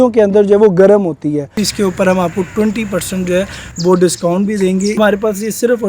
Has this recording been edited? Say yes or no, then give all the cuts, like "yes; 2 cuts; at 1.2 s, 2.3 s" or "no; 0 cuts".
yes; 2 cuts; at 1.6 s, 5.0 s